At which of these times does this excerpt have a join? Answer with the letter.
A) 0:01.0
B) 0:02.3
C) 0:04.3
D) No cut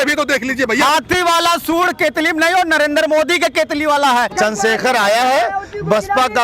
C